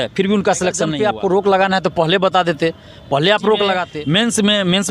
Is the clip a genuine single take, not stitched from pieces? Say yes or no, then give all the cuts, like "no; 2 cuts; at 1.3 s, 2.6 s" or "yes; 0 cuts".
no; 2 cuts; at 0.9 s, 3.9 s